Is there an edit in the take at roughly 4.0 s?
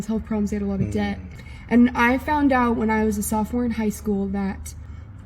no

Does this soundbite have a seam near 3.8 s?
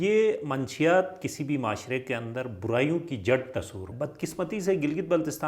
yes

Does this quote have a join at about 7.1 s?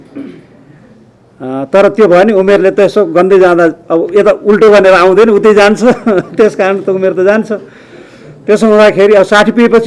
no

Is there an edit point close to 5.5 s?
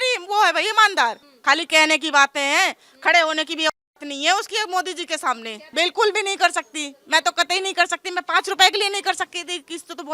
yes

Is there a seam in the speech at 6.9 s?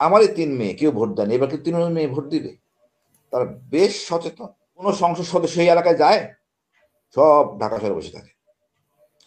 no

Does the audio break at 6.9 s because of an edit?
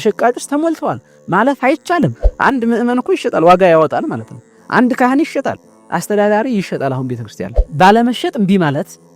no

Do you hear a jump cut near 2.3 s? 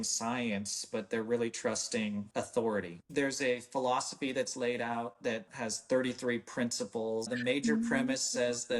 yes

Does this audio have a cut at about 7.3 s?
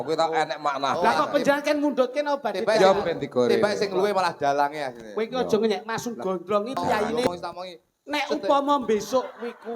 yes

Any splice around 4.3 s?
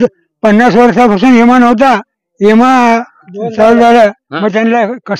yes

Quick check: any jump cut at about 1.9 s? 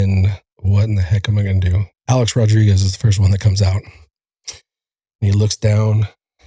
yes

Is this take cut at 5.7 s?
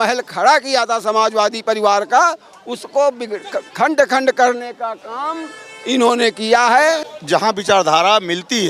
no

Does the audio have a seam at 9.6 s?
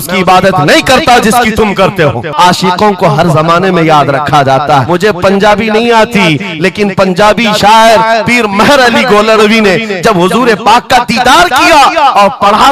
no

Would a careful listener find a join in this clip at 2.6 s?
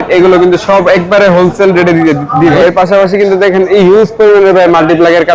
yes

